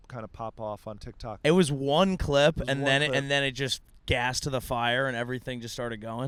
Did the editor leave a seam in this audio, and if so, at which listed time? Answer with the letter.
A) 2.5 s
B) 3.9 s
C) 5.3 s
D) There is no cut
D